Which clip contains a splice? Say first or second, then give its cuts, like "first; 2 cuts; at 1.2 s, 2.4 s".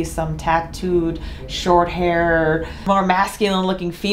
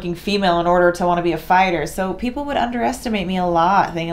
first; 1 cut; at 2.8 s